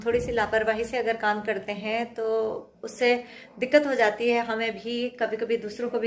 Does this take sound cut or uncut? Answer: uncut